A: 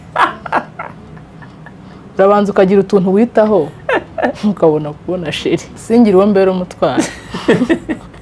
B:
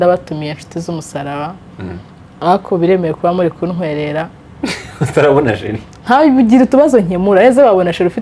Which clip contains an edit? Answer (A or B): A